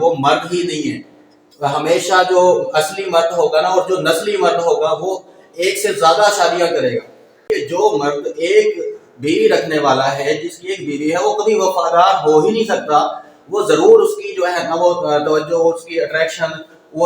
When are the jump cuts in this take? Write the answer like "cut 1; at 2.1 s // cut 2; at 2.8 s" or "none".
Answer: cut 1; at 7.5 s